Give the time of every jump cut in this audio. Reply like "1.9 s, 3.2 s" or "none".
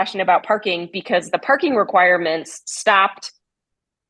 none